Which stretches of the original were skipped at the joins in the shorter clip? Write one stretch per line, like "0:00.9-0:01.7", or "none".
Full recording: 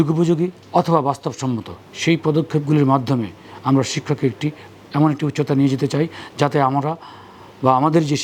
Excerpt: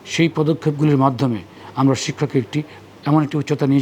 none